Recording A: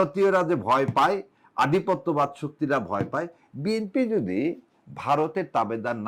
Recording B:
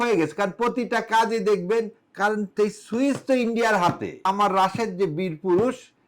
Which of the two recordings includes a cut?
B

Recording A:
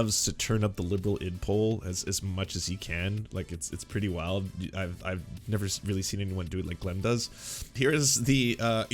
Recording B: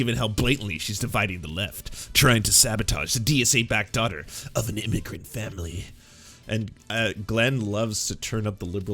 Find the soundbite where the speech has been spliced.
A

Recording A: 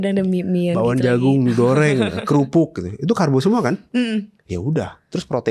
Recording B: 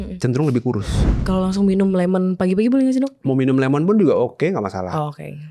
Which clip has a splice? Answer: B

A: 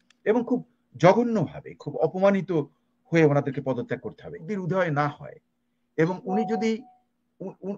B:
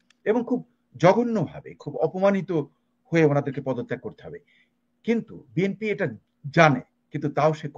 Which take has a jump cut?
A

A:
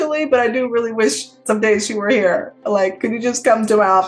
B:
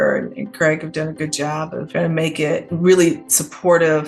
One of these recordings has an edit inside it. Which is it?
B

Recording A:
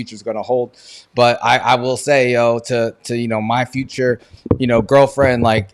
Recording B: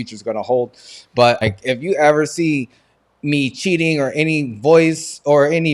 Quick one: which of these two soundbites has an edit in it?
B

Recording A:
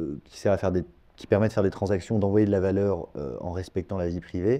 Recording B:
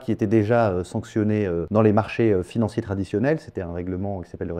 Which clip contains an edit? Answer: B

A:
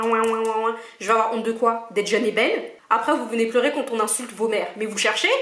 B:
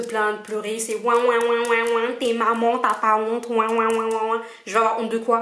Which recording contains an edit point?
A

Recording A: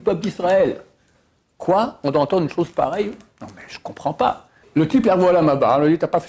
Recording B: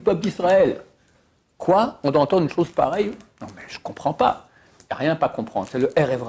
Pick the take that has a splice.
A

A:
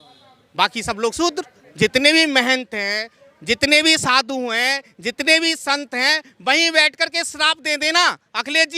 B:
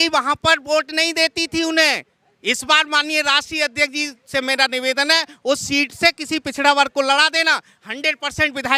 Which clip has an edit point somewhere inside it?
A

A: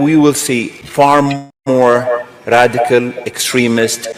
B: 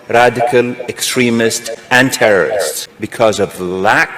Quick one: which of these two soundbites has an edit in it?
B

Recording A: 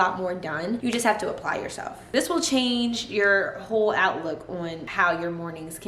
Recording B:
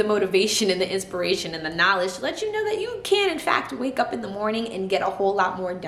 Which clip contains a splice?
A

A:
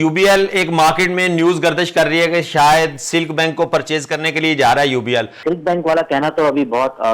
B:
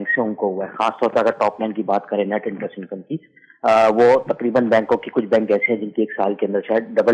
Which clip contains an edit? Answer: A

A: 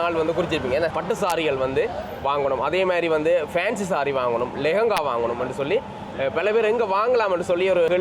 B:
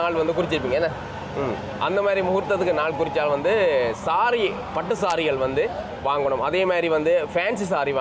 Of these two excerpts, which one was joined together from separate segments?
A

